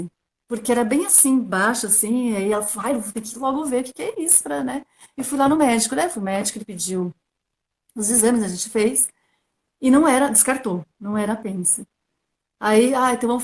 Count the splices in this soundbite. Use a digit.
0